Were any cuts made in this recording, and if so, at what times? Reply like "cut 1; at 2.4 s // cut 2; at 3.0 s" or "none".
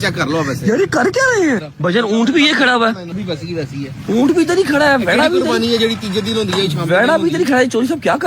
cut 1; at 1.7 s // cut 2; at 3.2 s